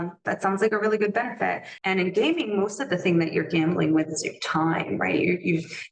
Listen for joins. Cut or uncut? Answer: cut